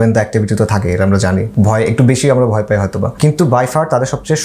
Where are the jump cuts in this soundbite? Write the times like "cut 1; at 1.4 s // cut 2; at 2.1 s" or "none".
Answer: cut 1; at 1.5 s // cut 2; at 3.1 s